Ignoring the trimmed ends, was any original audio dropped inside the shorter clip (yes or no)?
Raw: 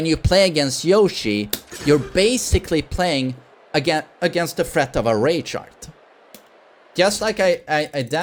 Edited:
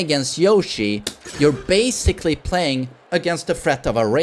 yes